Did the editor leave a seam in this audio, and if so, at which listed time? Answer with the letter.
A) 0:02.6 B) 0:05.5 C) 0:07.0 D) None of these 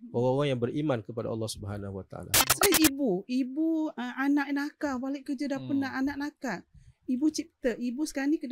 A